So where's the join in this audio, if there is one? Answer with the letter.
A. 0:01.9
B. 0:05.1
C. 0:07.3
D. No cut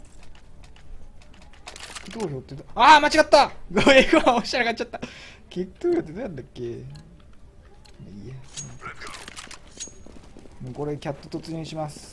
C